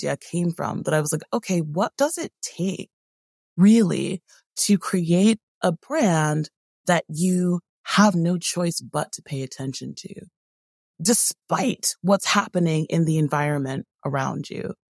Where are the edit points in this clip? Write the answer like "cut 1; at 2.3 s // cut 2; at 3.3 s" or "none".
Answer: cut 1; at 1.9 s // cut 2; at 10.9 s